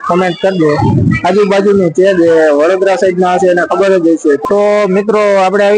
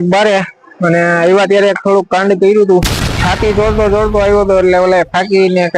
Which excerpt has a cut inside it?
first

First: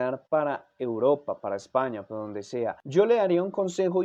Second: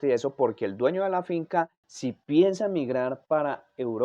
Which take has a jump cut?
second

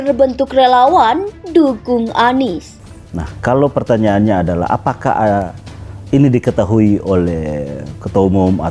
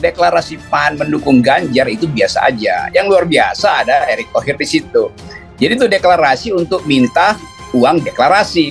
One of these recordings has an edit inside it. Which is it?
first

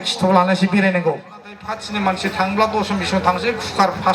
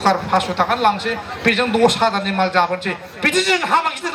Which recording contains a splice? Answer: first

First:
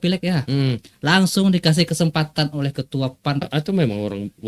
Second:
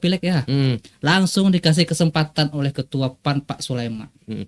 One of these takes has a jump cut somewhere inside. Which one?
first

